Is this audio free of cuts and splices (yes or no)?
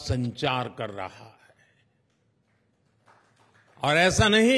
yes